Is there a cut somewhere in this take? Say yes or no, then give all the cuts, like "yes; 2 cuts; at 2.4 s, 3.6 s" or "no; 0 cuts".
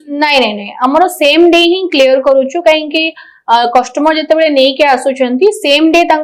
no; 0 cuts